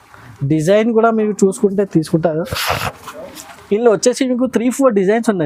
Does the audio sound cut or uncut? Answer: uncut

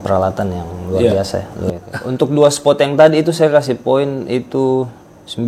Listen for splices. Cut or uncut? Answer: cut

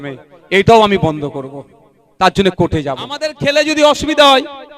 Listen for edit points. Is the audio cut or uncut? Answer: cut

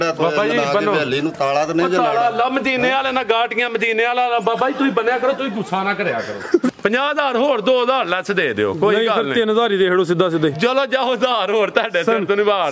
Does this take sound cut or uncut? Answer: cut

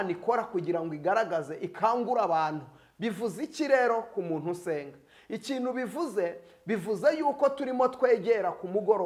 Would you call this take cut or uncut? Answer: uncut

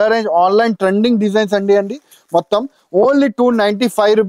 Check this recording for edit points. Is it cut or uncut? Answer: uncut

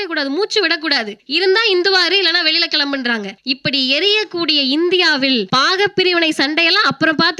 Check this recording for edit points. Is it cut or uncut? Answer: cut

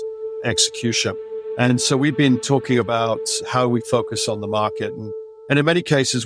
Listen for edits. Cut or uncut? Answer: cut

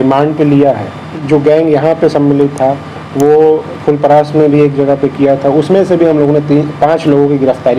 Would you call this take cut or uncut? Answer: cut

